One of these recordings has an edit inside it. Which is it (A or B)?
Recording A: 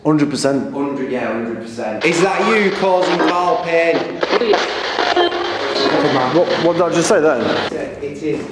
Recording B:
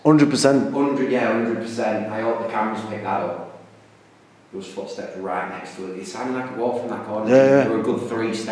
A